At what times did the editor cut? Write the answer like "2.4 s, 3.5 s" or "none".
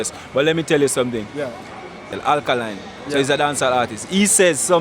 2.1 s